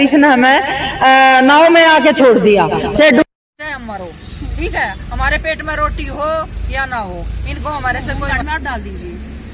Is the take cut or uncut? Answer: cut